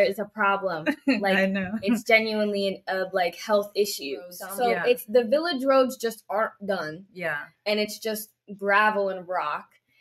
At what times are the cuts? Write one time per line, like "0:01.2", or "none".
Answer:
0:04.4

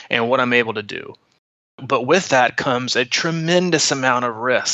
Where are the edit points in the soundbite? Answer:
0:01.7

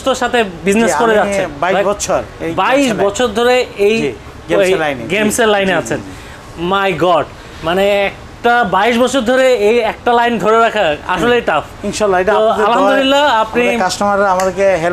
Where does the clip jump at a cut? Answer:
none

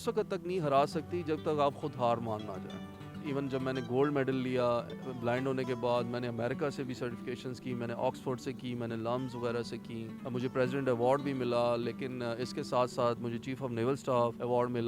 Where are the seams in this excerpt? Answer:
none

